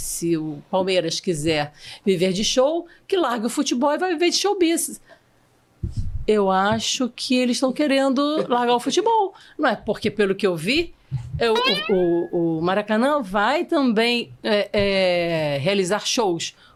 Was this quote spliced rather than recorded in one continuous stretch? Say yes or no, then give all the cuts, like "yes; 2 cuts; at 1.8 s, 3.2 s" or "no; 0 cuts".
no; 0 cuts